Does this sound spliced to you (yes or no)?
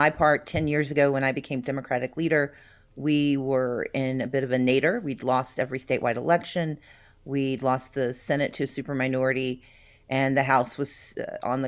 no